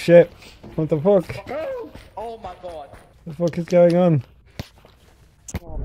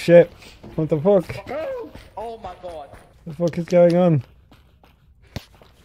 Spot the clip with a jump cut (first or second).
first